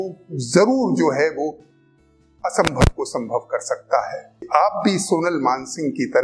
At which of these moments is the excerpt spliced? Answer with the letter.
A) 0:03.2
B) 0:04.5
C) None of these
B